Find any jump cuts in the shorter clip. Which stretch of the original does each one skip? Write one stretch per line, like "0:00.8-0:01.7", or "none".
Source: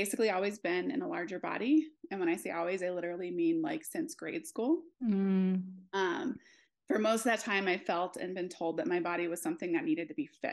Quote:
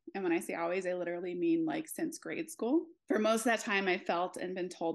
0:04.9-0:06.7